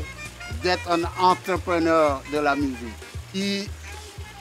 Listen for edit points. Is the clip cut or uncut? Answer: cut